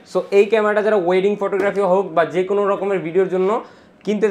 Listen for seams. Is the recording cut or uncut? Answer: uncut